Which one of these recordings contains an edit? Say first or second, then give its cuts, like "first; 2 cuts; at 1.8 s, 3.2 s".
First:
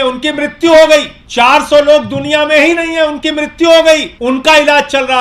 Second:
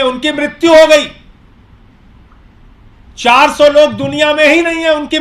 first; 2 cuts; at 1.2 s, 4.1 s